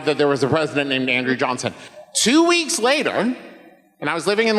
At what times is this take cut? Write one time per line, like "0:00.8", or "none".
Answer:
0:01.8